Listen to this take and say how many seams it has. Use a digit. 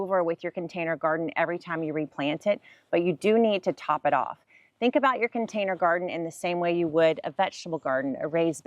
0